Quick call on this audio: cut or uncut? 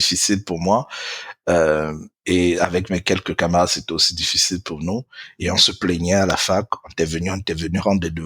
uncut